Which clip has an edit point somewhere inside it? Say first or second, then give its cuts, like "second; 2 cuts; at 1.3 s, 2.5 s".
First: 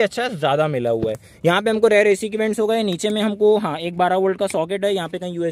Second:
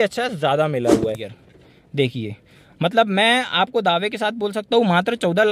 second; 1 cut; at 1.3 s